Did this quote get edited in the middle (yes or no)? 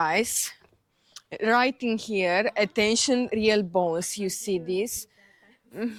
no